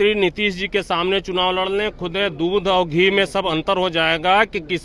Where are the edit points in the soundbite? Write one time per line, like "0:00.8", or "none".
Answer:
none